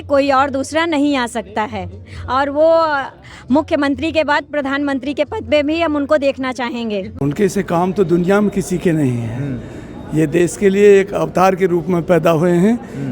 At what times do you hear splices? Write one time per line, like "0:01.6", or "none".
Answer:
0:07.1